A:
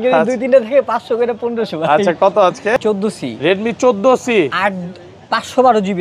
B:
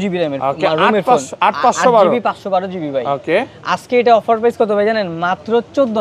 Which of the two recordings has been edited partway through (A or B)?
A